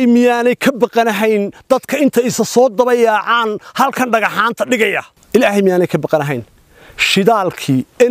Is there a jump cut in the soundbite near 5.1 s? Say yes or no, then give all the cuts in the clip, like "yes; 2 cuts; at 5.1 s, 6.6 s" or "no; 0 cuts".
yes; 1 cut; at 5.1 s